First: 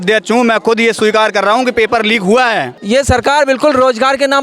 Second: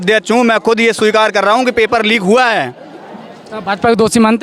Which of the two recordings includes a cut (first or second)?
first